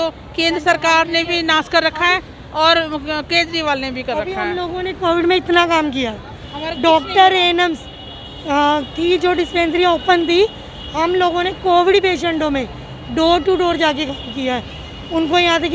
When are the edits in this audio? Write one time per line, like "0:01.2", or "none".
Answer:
none